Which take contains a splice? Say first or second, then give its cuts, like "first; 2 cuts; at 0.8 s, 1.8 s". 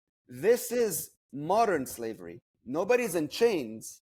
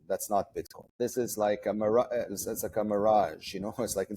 second; 1 cut; at 1.0 s